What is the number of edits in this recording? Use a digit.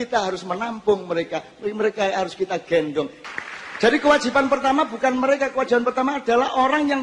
1